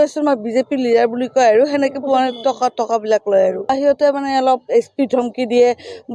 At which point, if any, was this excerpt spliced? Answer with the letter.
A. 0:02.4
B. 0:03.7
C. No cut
B